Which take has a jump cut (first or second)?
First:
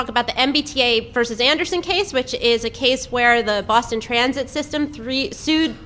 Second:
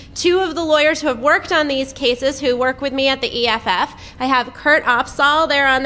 first